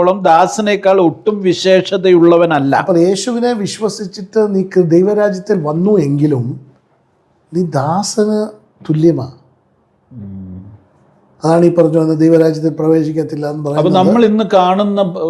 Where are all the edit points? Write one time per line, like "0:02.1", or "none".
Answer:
none